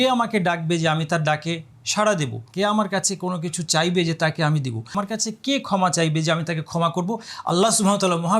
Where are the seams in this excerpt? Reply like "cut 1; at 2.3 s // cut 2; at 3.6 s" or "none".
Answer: cut 1; at 2.4 s // cut 2; at 5.0 s